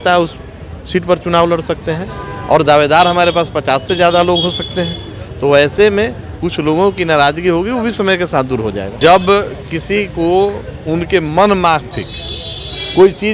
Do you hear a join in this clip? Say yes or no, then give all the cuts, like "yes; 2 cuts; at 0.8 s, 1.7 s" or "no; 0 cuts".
yes; 1 cut; at 8.9 s